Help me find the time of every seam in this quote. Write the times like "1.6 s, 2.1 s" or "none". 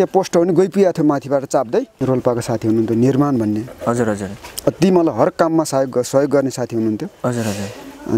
1.9 s